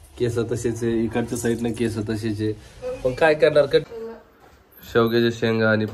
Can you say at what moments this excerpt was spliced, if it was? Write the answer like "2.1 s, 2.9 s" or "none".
3.9 s